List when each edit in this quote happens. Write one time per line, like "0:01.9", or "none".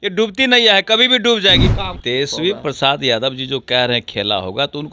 0:01.9